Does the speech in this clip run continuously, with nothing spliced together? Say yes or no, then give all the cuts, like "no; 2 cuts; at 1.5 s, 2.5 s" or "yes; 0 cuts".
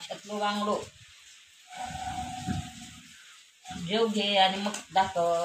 yes; 0 cuts